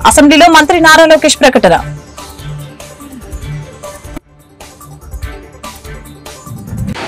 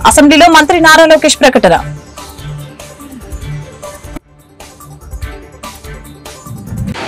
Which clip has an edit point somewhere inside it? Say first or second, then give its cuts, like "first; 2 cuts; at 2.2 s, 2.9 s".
first; 2 cuts; at 1.8 s, 5.7 s